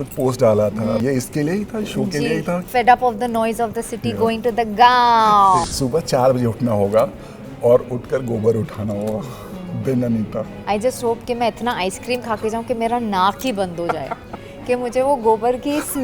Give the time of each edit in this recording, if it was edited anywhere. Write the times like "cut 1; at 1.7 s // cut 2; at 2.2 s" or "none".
cut 1; at 1.0 s // cut 2; at 2.6 s // cut 3; at 5.7 s // cut 4; at 10.6 s